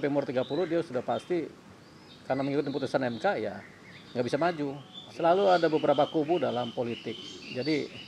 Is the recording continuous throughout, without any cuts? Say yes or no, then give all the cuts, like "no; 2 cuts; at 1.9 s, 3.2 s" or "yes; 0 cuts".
no; 1 cut; at 5.0 s